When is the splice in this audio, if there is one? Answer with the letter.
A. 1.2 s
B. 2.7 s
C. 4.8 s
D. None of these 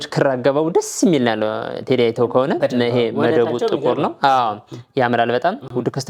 D